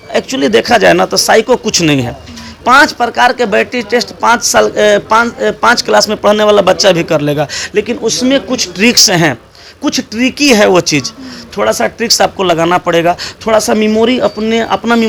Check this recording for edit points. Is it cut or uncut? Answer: uncut